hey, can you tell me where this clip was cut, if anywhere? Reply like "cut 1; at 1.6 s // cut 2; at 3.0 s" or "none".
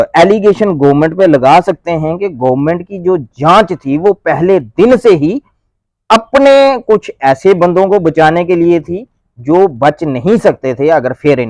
none